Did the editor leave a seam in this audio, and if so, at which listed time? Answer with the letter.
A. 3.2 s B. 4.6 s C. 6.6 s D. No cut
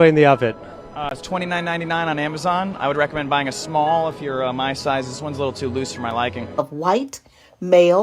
C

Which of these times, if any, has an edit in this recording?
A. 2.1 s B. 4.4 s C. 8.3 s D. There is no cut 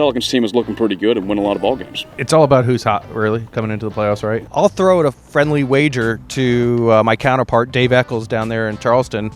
B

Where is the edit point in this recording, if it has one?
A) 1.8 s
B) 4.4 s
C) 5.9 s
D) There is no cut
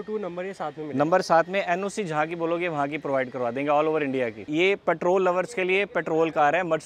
B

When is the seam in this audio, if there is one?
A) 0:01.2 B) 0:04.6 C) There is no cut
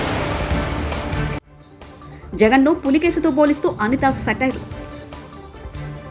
A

